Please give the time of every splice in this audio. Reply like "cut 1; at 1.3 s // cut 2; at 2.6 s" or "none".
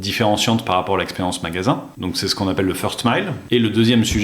cut 1; at 1.9 s // cut 2; at 3.4 s